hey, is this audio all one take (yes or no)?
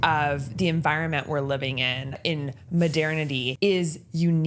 no